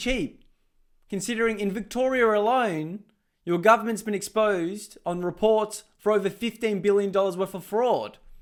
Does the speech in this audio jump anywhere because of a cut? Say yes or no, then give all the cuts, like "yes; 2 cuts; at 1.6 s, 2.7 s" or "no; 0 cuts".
no; 0 cuts